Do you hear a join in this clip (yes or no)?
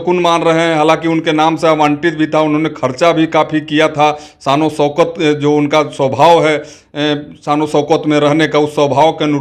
no